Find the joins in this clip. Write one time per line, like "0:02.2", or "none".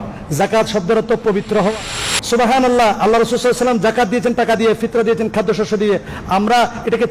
0:01.7